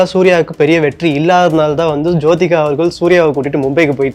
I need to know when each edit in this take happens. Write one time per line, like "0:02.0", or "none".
none